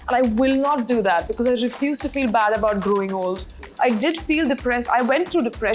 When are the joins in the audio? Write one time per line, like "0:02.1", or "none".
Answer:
0:03.6